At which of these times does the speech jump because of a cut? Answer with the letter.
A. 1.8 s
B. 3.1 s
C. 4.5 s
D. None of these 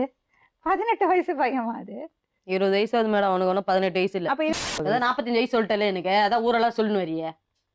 C